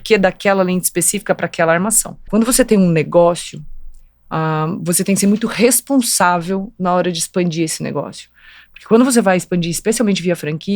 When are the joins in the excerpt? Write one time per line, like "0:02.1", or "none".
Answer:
0:02.2

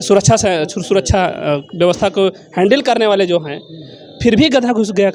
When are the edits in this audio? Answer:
none

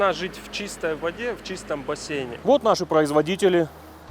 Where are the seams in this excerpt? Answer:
0:02.3

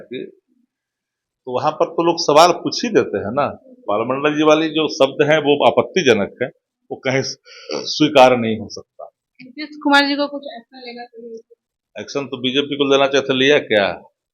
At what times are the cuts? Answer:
0:03.8

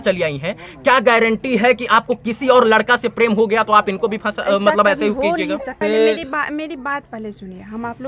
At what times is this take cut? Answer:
0:05.7

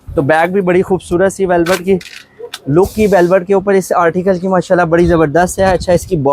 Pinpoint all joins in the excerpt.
none

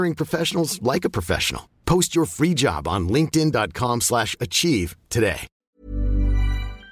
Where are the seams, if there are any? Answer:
0:05.5

